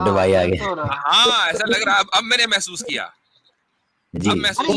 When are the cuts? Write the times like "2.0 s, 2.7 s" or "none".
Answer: none